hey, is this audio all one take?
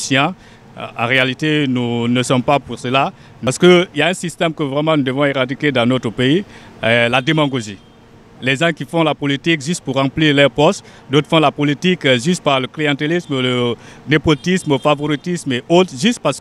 no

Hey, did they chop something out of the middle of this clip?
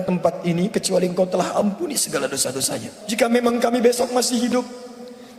yes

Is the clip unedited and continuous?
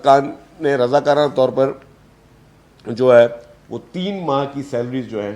yes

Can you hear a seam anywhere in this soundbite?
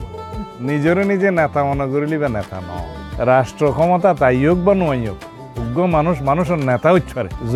no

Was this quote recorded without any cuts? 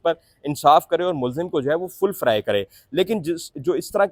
yes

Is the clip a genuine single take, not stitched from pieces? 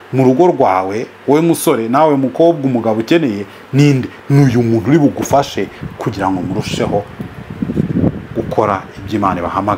yes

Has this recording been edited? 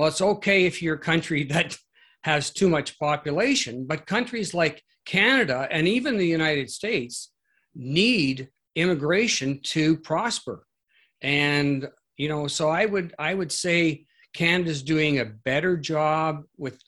no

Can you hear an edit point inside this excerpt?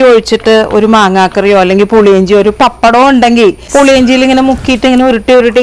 yes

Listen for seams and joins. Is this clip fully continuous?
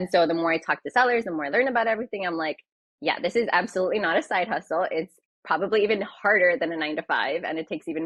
yes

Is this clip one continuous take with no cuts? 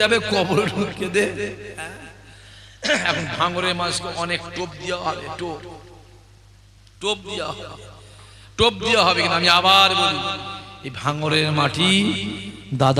yes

